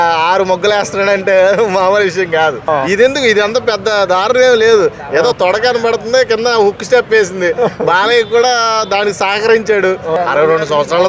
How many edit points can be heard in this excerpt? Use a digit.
2